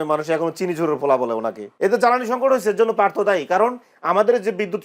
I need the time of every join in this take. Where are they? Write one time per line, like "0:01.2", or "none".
0:01.6

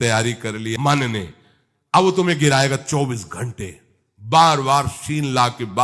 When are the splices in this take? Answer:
none

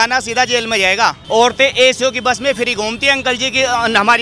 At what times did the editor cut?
0:01.2

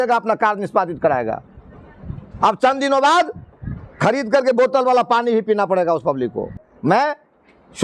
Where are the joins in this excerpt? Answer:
0:06.7

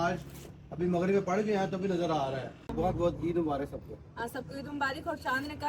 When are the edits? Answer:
0:02.6

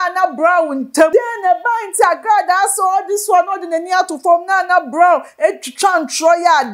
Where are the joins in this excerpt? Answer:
0:01.1

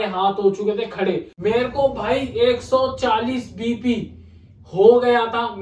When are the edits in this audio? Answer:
0:01.3

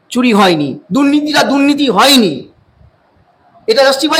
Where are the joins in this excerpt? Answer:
none

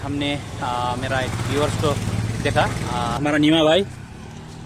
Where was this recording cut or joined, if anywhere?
0:03.2

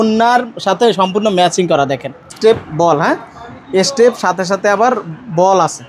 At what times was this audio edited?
0:02.3

